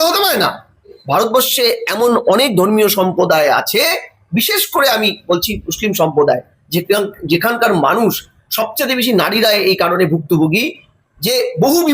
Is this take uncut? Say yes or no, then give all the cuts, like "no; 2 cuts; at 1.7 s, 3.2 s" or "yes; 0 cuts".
no; 1 cut; at 0.9 s